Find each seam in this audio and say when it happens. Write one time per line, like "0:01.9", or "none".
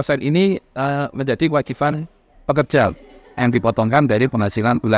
none